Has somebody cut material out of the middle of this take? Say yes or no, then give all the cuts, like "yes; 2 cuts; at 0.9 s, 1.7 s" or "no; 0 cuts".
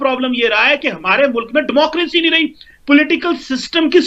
no; 0 cuts